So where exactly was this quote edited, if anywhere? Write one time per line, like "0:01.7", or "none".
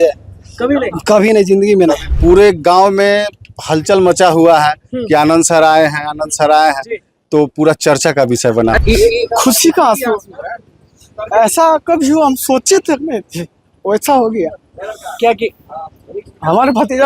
0:02.0
0:08.8